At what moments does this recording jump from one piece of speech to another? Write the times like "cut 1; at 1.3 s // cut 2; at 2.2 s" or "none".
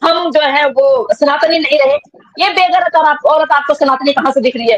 none